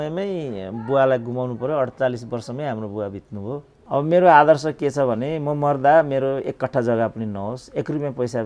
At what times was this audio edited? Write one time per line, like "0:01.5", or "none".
0:03.7